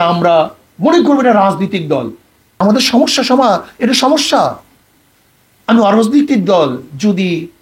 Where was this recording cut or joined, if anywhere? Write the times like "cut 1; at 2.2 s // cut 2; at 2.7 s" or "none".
cut 1; at 2.6 s